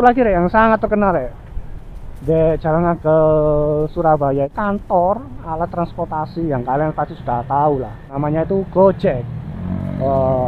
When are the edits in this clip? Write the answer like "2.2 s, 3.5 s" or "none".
4.5 s, 8.1 s

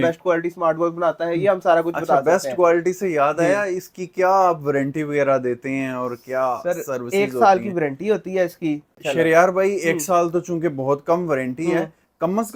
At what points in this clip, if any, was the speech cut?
none

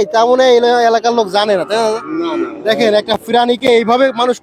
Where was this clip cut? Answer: none

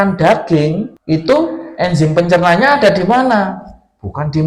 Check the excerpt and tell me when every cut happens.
0.9 s

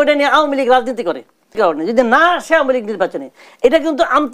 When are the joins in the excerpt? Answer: 1.5 s

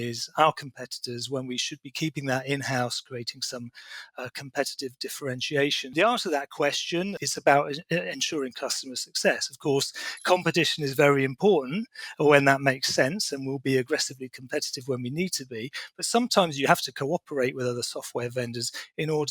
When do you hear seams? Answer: 5.9 s, 7.2 s

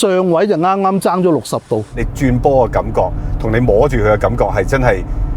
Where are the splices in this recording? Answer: 2.0 s

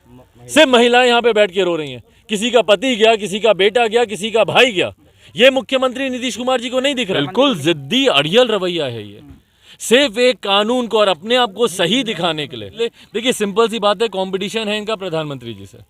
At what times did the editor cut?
7.2 s, 12.7 s

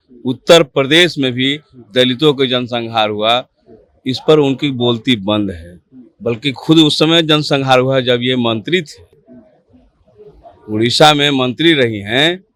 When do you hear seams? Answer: none

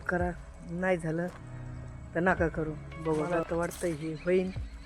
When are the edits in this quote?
3.3 s

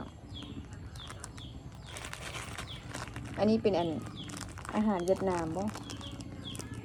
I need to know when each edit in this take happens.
none

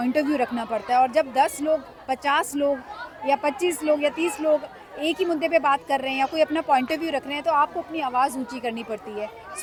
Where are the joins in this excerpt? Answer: none

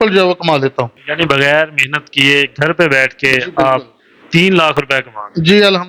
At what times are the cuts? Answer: 1.0 s

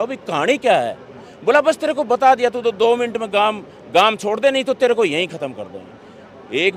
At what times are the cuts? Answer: none

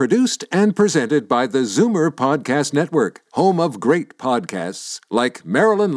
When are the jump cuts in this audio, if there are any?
none

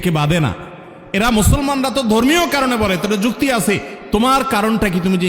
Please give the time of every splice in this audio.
none

